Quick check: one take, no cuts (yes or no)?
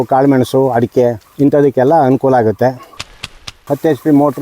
no